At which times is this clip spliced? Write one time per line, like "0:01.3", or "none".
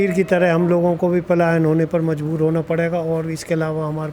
none